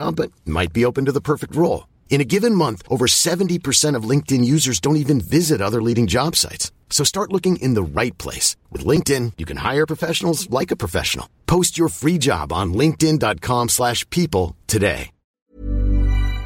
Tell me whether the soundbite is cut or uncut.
cut